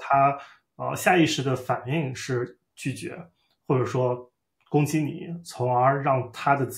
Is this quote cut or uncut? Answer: uncut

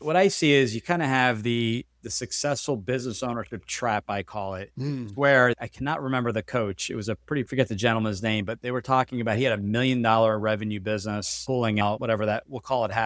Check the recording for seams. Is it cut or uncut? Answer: uncut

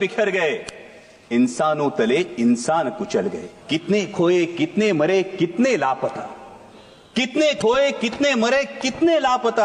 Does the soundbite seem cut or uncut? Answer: cut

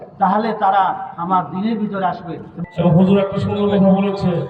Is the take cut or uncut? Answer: cut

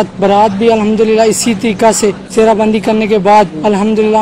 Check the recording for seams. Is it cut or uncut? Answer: uncut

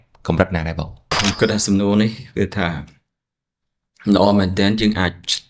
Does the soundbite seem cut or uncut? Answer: cut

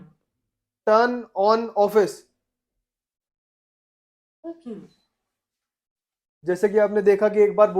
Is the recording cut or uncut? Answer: uncut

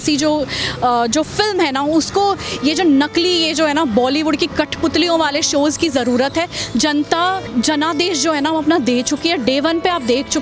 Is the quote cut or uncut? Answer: cut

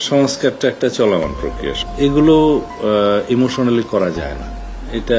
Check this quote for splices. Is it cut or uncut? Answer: cut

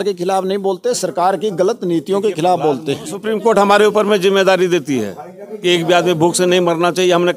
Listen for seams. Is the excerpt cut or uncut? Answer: cut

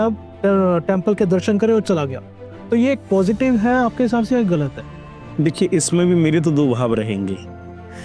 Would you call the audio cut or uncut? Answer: uncut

